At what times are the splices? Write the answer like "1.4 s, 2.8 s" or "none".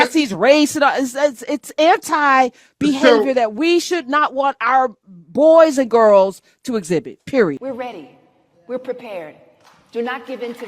7.5 s